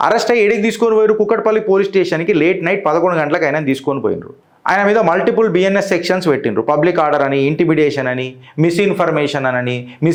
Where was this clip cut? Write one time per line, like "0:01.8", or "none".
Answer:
none